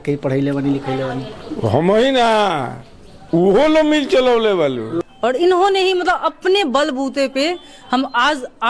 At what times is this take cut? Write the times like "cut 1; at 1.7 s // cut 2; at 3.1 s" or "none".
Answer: cut 1; at 4.9 s